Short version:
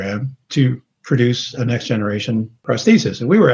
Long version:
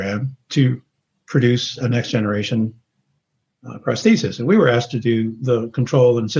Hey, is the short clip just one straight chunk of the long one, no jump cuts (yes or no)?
no